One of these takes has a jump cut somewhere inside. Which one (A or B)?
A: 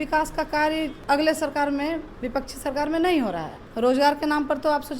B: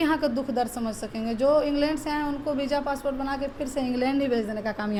A